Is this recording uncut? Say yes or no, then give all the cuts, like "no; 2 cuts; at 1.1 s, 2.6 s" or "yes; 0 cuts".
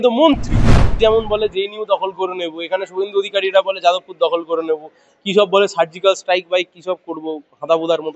no; 1 cut; at 0.9 s